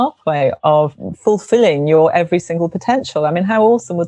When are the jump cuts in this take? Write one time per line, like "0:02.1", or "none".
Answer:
0:01.1